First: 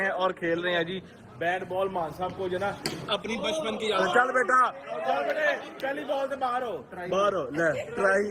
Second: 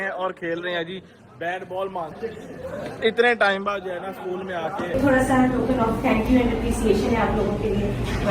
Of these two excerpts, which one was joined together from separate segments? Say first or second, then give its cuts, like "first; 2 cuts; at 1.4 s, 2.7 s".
second; 2 cuts; at 2.1 s, 4.9 s